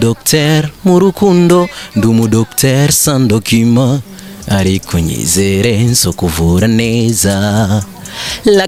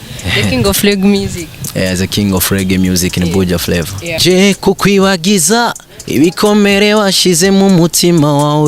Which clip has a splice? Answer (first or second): second